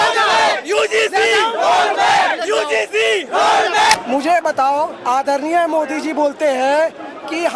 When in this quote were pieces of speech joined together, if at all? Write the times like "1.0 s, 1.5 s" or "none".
3.9 s